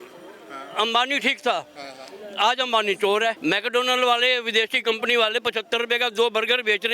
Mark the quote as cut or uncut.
cut